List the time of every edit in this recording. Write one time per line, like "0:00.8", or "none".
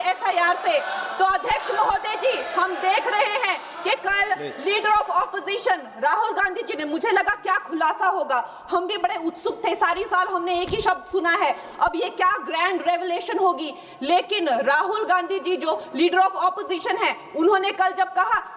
none